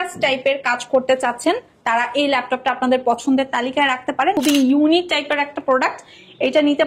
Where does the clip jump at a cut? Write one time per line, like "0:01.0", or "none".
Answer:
0:04.3